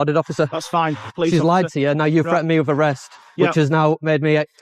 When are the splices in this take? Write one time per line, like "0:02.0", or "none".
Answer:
0:01.1